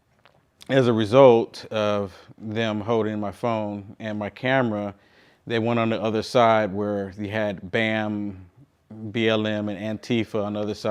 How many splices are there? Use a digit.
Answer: 0